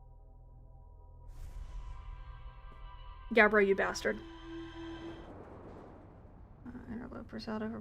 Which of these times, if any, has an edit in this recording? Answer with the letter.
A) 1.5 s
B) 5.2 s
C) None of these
B